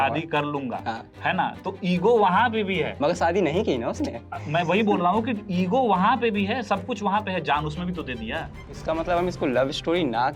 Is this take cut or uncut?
cut